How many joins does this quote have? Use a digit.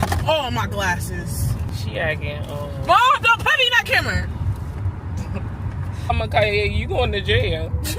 2